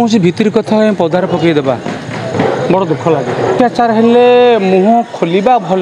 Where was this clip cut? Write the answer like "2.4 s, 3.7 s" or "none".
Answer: 3.5 s